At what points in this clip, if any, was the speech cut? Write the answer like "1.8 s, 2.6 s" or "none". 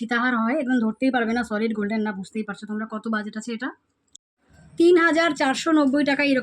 4.2 s